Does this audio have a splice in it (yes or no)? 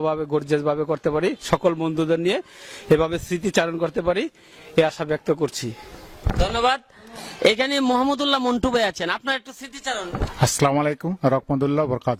no